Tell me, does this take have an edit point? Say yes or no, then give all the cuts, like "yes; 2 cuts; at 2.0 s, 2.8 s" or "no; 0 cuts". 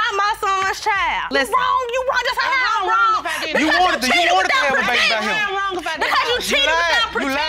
no; 0 cuts